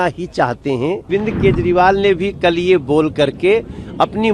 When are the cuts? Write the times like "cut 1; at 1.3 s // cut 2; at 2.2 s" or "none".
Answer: cut 1; at 1.1 s